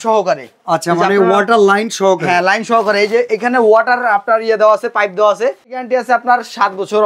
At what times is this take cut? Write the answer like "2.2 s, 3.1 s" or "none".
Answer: 5.8 s